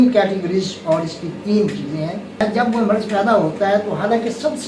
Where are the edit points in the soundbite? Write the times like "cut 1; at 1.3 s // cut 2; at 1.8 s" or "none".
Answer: cut 1; at 2.4 s